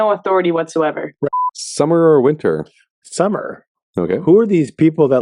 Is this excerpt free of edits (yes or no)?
no